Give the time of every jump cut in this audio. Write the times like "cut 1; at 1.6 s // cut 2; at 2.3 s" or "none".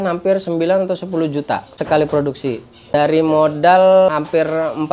cut 1; at 1.7 s // cut 2; at 2.9 s // cut 3; at 4.1 s